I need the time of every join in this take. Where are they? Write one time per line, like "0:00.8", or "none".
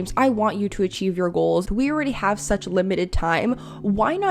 0:01.7